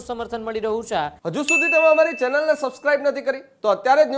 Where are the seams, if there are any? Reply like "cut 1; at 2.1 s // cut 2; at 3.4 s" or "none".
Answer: cut 1; at 1.2 s